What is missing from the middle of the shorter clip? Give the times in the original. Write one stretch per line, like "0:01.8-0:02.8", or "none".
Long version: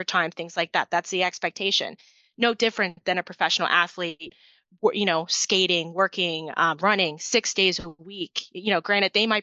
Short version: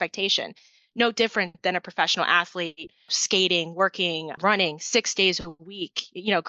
0:04.6-0:05.3
0:06.5-0:06.8